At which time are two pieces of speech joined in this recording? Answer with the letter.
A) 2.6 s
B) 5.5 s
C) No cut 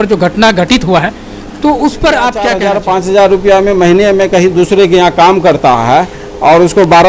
A